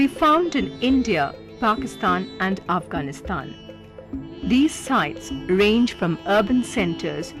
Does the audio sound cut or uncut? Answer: uncut